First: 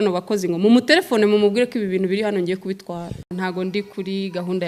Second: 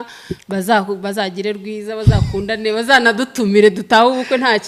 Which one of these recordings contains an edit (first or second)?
first